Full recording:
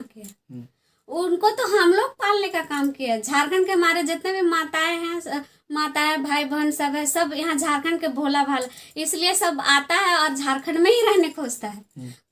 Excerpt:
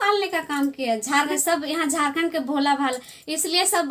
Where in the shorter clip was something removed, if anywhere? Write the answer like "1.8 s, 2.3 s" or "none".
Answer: 1.3 s